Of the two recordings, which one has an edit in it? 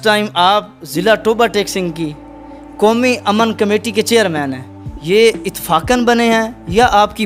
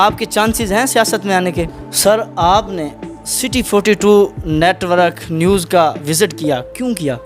second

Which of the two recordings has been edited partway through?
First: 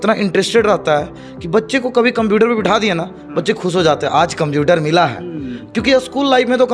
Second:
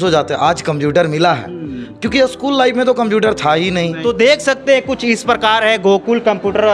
second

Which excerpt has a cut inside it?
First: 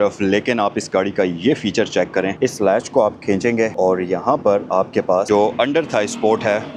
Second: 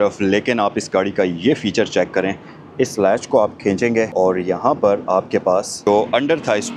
first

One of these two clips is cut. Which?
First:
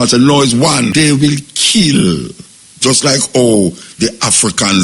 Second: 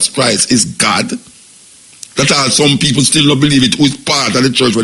first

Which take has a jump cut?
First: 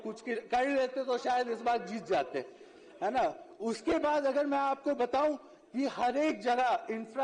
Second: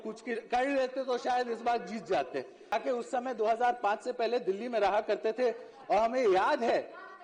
second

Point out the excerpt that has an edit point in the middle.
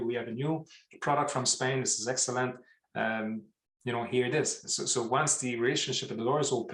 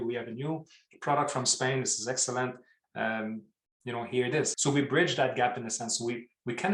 second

